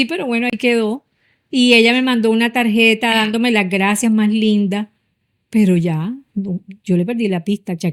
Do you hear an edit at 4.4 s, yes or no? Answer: no